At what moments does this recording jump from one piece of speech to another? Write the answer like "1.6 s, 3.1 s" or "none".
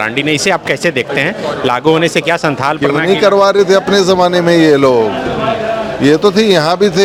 none